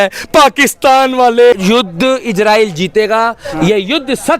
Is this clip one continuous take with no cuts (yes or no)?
no